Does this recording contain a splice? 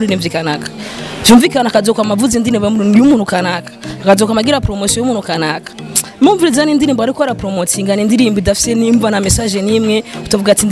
no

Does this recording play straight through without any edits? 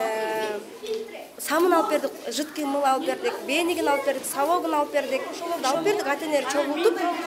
no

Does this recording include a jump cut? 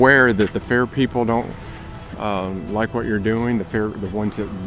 no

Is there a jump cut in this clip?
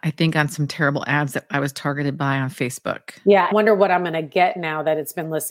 no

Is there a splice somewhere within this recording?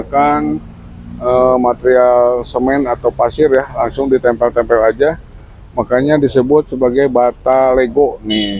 no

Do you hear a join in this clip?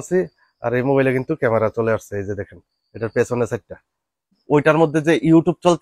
yes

